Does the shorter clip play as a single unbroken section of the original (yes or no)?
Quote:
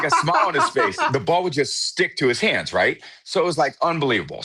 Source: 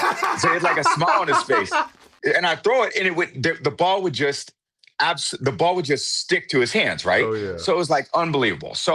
no